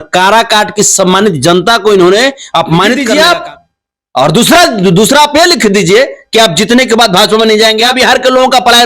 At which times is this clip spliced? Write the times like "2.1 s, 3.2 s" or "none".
3.0 s, 7.9 s

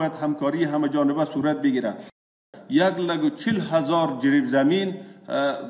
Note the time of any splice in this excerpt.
2.3 s

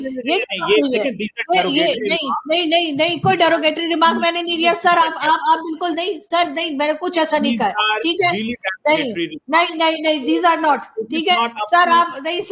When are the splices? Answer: none

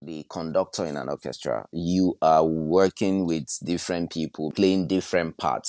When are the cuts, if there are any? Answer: 4.4 s

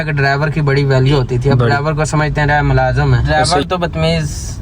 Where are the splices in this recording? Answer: 3.3 s

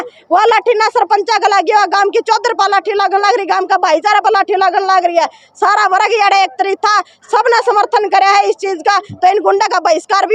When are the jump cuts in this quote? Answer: none

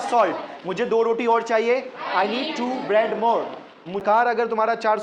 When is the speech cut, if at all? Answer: 4.0 s

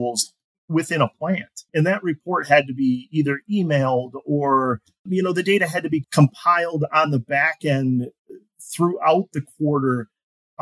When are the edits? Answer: 1.6 s, 5.0 s, 6.0 s

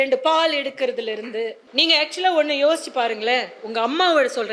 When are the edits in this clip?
1.6 s

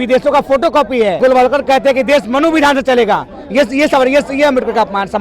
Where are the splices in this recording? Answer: 1.2 s

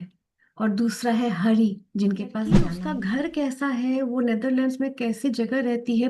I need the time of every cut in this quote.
2.7 s

